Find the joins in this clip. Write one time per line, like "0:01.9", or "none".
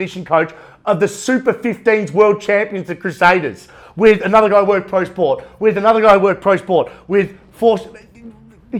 none